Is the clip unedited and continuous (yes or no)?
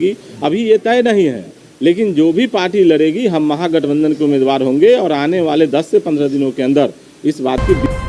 yes